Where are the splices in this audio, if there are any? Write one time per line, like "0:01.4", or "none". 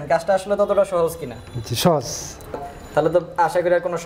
0:02.6